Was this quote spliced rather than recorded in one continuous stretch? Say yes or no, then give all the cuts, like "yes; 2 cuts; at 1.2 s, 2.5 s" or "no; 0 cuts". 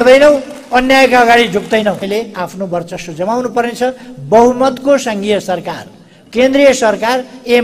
yes; 1 cut; at 2.1 s